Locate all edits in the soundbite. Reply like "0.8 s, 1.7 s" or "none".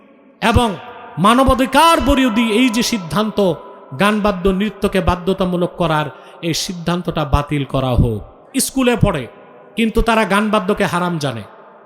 8.4 s